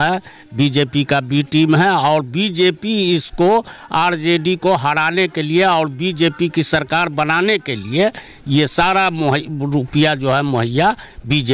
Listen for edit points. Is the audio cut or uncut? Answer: uncut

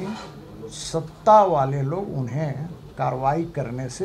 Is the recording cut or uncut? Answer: uncut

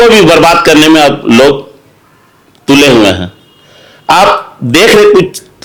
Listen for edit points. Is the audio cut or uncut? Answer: uncut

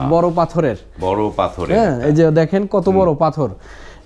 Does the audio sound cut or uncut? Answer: uncut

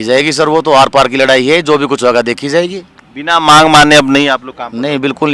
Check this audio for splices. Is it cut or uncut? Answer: uncut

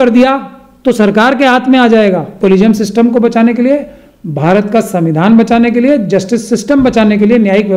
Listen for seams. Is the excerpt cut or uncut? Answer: cut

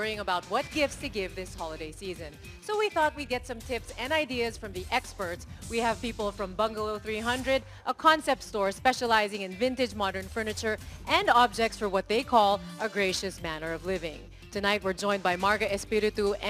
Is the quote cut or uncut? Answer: uncut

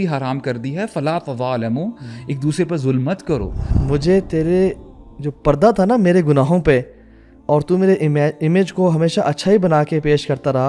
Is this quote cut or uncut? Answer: cut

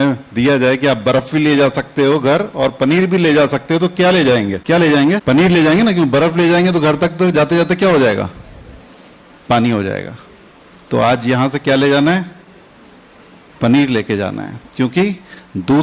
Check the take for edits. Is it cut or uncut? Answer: cut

